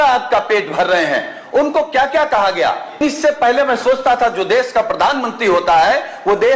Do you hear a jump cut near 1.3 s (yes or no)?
no